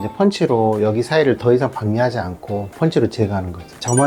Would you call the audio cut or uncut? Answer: uncut